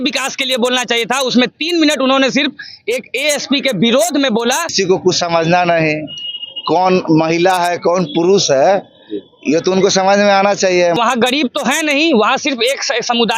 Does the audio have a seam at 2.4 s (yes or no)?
no